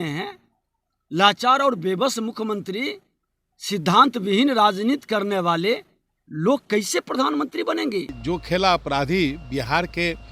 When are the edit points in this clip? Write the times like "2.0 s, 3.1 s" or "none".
8.2 s